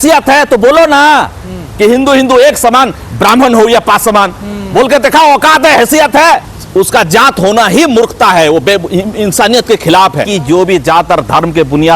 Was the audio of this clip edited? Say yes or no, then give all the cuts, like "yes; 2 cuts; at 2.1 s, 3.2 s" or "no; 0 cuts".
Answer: yes; 2 cuts; at 6.6 s, 10.3 s